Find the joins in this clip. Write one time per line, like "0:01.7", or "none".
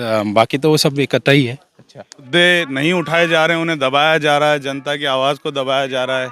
0:02.3